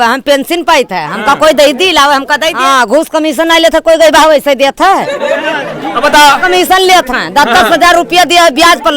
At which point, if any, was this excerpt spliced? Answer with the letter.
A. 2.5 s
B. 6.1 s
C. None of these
A